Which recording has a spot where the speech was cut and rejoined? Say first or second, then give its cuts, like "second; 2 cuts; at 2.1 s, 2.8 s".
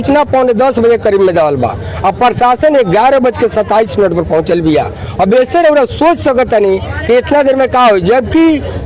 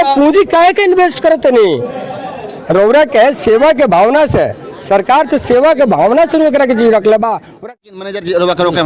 second; 1 cut; at 7.5 s